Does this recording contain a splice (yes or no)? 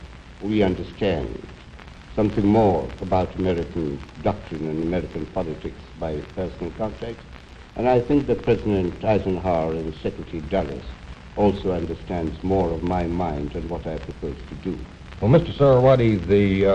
yes